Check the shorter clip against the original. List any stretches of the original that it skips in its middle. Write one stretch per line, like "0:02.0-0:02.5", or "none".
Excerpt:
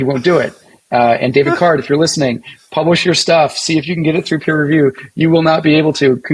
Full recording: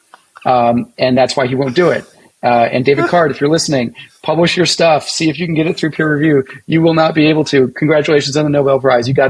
none